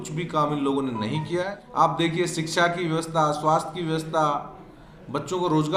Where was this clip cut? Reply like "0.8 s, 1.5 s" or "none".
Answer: 1.6 s